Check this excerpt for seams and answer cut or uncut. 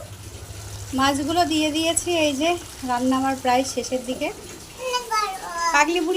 cut